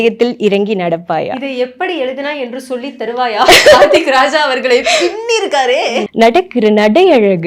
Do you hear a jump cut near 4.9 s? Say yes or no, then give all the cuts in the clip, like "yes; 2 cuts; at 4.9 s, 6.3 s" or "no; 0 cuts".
no; 1 cut; at 6.1 s